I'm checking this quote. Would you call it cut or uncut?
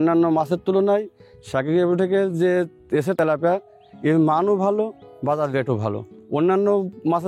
uncut